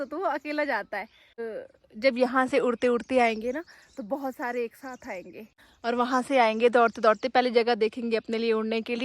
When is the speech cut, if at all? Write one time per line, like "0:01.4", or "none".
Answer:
0:01.4
0:05.5